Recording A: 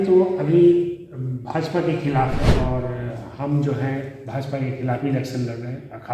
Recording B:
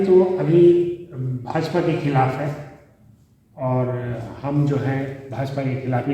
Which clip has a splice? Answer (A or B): A